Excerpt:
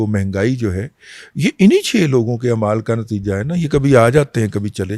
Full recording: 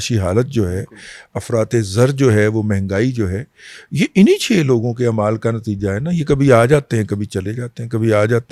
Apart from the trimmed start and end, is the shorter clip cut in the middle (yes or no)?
no